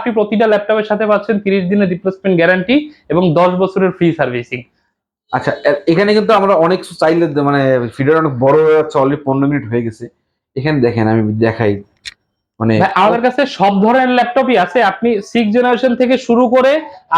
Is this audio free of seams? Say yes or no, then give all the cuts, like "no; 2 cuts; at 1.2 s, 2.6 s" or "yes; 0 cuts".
yes; 0 cuts